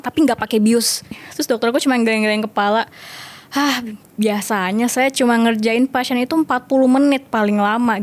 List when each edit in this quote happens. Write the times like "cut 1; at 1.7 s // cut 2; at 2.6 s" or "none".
cut 1; at 1.2 s